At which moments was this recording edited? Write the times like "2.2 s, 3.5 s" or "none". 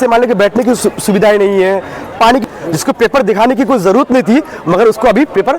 2.4 s